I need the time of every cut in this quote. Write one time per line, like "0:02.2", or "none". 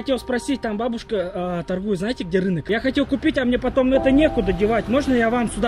0:02.6